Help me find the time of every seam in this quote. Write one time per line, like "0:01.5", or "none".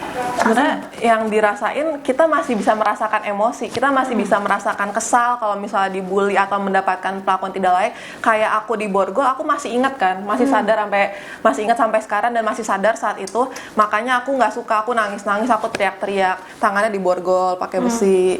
0:16.5